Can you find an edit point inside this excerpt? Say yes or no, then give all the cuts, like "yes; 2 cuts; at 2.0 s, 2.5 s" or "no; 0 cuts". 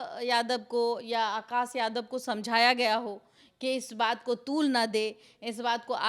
no; 0 cuts